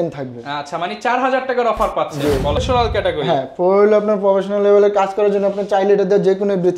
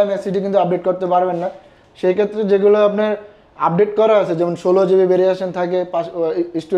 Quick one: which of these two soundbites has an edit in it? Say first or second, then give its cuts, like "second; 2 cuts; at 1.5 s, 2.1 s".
first; 1 cut; at 2.6 s